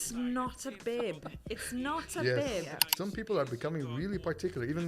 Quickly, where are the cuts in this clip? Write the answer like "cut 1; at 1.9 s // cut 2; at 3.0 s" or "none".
cut 1; at 2.7 s